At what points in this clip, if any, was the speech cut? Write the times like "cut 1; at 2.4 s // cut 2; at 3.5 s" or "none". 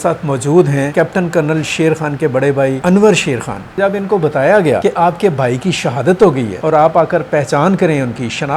cut 1; at 0.9 s // cut 2; at 2.8 s // cut 3; at 3.8 s // cut 4; at 4.8 s // cut 5; at 6.5 s